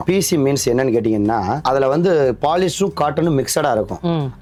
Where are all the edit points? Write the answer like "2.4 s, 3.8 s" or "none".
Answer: none